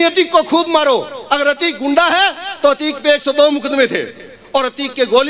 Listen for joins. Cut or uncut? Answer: uncut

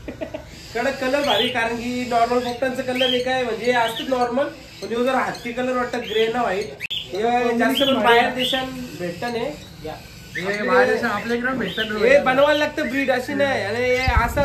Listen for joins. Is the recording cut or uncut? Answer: uncut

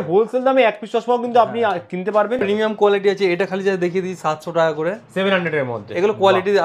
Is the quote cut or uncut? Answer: cut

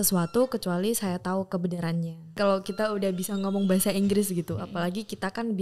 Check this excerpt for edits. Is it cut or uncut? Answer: cut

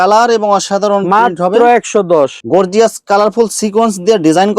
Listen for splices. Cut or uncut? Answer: cut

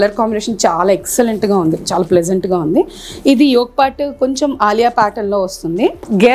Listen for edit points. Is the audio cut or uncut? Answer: uncut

